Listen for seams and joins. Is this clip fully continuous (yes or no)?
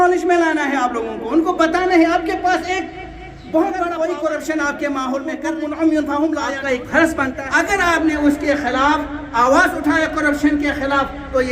no